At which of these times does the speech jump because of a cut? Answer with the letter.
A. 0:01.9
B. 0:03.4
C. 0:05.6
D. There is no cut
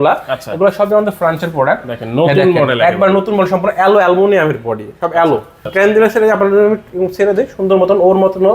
C